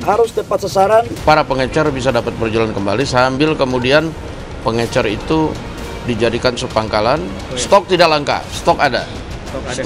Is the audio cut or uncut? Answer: cut